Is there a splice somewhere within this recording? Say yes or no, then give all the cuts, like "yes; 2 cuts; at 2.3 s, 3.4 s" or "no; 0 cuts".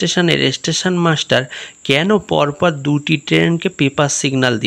no; 0 cuts